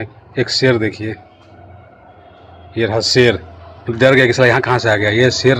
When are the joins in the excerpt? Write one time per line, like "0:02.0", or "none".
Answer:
none